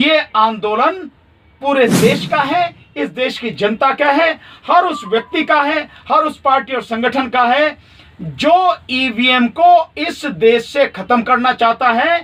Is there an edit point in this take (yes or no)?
no